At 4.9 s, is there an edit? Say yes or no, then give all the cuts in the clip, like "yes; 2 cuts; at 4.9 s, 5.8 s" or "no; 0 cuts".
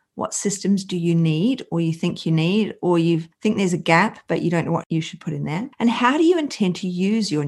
yes; 1 cut; at 4.9 s